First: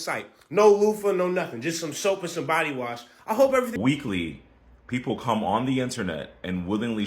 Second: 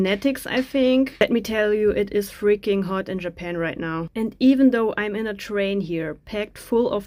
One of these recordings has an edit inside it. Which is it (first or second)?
first